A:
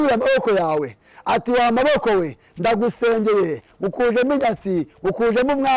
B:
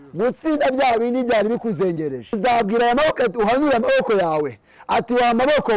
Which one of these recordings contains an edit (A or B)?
B